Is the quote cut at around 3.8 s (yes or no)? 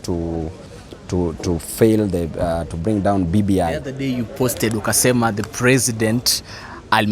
yes